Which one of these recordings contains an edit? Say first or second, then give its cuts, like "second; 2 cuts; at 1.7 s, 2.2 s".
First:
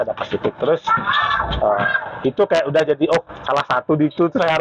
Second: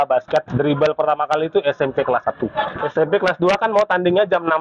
second; 1 cut; at 2.8 s